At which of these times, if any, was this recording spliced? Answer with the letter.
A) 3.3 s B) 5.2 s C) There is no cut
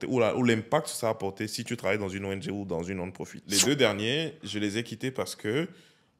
A